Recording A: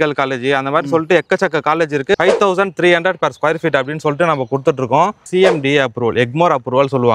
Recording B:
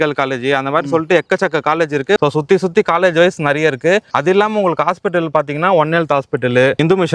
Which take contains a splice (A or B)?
A